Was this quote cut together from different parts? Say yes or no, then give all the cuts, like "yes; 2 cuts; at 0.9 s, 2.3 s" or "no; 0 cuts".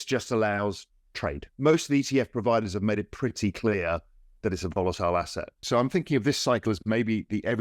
yes; 2 cuts; at 1.4 s, 5.5 s